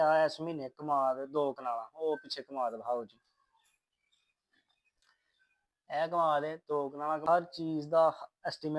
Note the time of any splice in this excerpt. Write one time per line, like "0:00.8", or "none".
0:07.2